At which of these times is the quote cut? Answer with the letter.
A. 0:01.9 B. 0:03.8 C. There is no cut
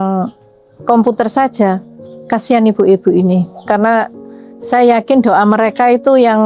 C